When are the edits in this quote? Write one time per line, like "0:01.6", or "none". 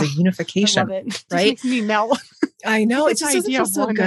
0:01.1